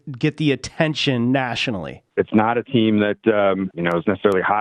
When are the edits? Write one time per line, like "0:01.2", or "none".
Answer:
0:01.9
0:03.7

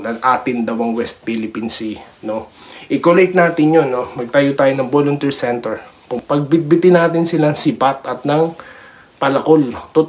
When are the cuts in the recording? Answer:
0:06.0

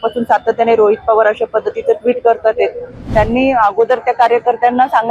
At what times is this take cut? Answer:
0:03.1

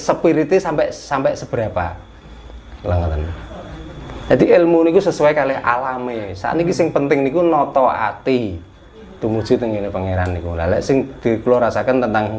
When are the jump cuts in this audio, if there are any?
0:04.0

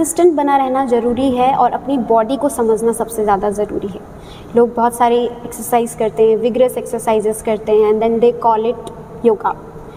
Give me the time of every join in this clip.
none

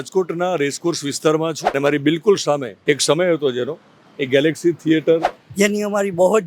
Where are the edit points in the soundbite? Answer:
0:01.7
0:02.7
0:05.4

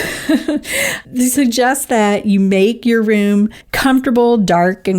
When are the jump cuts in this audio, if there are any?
0:03.6

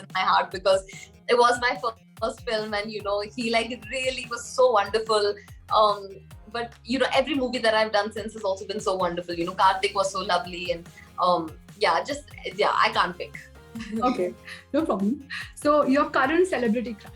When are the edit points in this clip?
none

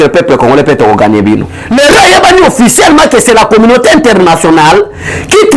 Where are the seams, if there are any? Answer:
0:01.6

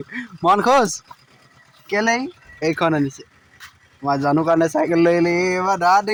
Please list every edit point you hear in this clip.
none

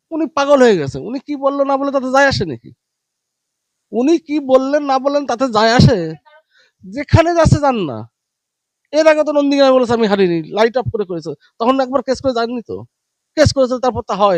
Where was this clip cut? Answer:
none

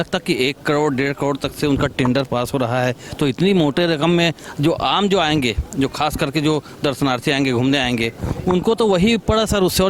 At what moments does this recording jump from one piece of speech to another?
none

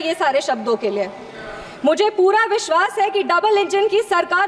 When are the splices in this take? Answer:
none

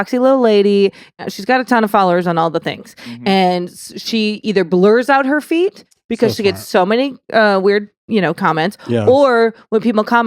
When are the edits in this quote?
0:01.2

